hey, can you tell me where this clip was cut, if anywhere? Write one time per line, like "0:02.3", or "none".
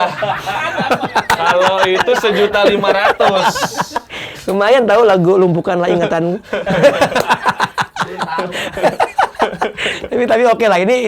none